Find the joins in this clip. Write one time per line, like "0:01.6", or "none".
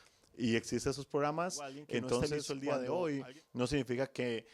0:02.5